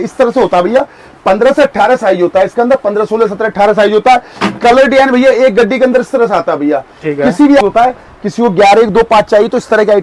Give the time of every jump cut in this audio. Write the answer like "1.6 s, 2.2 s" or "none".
7.6 s